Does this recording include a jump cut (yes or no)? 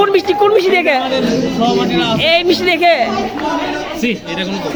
no